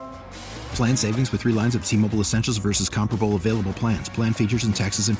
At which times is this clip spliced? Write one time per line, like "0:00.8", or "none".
none